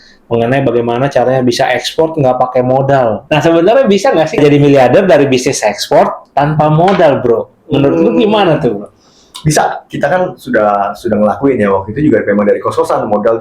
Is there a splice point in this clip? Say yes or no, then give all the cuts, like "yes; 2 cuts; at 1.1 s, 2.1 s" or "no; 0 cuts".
yes; 2 cuts; at 3.2 s, 9.8 s